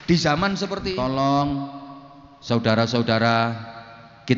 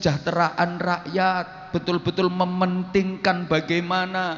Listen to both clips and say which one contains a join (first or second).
first